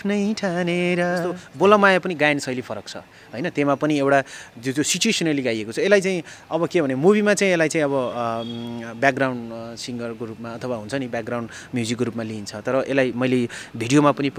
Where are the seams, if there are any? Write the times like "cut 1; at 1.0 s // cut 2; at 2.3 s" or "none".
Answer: cut 1; at 1.4 s